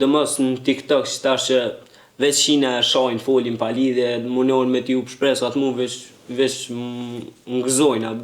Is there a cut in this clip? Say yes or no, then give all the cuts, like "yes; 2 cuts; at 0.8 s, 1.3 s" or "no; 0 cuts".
no; 0 cuts